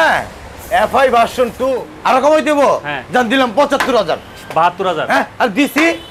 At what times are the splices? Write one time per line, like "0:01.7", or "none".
0:01.9